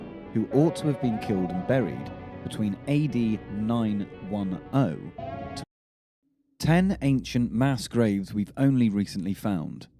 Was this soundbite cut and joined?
no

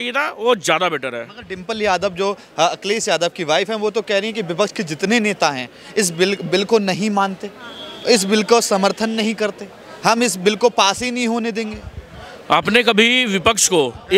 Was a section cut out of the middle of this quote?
no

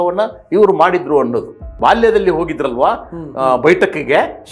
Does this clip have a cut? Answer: yes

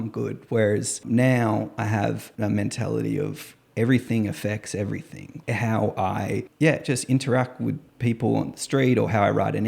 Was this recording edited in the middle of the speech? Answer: yes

